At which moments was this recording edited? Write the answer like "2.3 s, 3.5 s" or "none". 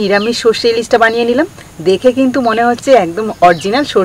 none

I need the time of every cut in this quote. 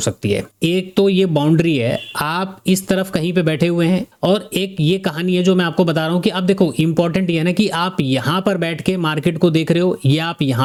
none

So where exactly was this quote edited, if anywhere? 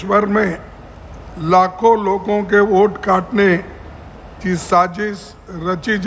none

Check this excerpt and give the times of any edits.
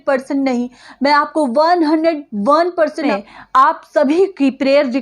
3.1 s

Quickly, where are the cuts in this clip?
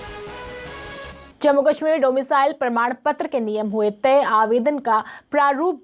1.3 s

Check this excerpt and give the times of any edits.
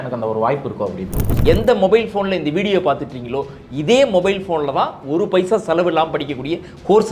1.3 s

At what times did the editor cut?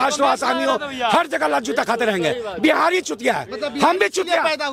none

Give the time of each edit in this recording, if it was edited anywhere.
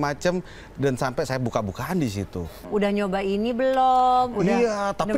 2.6 s

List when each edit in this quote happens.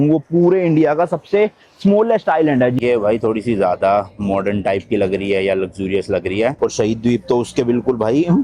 2.8 s, 6.6 s

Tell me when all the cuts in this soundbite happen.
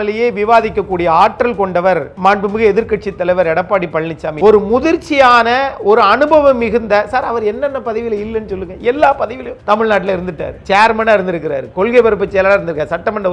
4.3 s

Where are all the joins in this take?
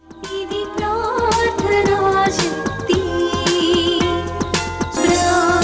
none

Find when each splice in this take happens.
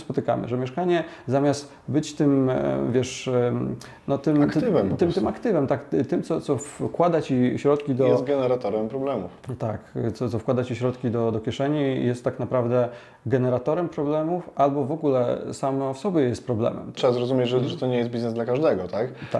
17.0 s

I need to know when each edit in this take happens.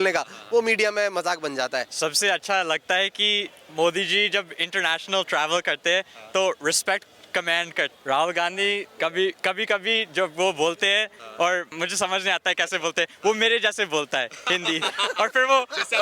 1.9 s, 7.9 s, 8.9 s, 11.7 s

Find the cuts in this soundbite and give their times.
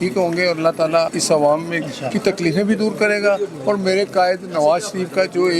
1.2 s

